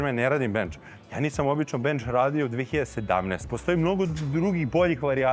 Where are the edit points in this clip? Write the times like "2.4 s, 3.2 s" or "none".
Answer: 3.5 s